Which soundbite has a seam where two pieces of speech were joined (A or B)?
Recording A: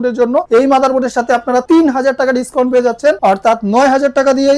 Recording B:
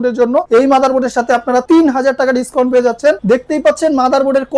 B